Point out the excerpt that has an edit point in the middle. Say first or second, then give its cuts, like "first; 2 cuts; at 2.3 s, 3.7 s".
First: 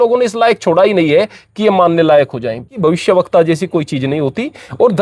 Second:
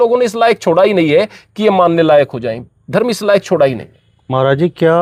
first; 1 cut; at 2.7 s